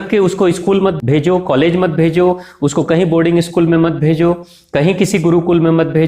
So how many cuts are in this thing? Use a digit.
1